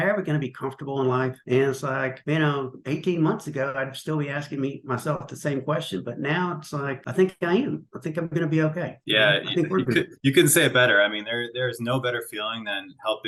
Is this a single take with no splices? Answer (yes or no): yes